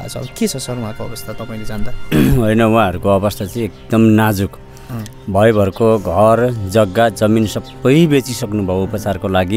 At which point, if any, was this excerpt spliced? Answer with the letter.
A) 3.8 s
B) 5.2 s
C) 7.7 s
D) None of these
D